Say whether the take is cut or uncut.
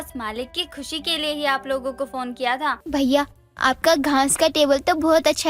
cut